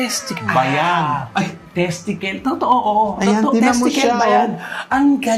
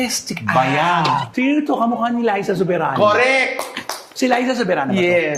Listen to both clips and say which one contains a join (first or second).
second